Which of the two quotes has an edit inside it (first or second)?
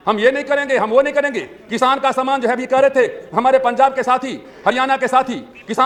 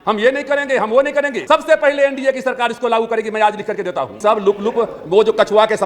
second